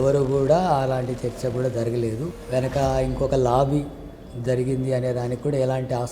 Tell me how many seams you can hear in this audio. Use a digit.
1